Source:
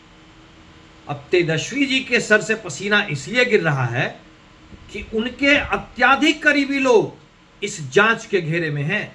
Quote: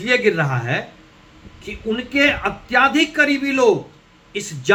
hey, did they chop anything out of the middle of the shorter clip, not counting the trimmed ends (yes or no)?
no